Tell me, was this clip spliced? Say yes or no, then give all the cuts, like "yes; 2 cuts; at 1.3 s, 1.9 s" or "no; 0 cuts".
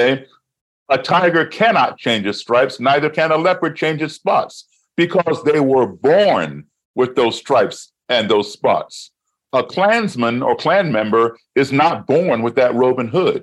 no; 0 cuts